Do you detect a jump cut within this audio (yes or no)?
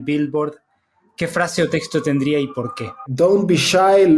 yes